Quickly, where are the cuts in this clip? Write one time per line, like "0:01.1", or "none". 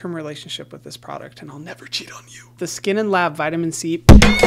0:02.5